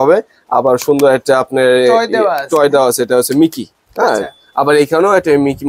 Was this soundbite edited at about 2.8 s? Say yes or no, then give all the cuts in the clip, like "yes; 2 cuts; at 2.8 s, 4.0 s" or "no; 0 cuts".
no; 0 cuts